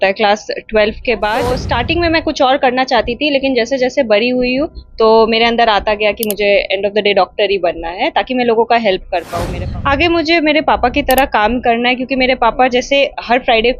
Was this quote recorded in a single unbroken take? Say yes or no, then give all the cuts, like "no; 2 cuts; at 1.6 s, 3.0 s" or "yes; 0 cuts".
no; 2 cuts; at 1.6 s, 9.4 s